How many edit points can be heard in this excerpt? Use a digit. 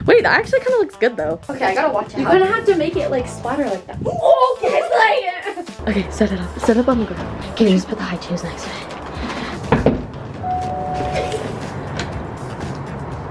4